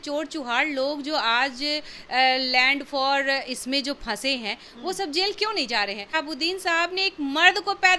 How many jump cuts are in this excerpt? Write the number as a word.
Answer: one